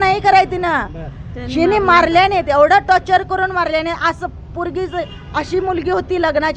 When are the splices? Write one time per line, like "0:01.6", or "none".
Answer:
none